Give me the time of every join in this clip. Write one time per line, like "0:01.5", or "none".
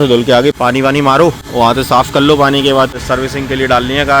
0:01.4
0:03.0